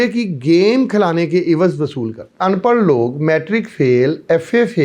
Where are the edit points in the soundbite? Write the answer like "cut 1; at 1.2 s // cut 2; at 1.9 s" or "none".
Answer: cut 1; at 2.3 s